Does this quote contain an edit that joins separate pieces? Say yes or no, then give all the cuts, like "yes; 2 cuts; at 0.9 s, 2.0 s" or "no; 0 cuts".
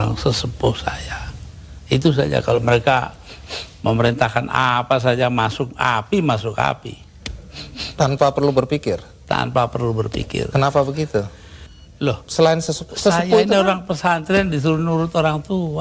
no; 0 cuts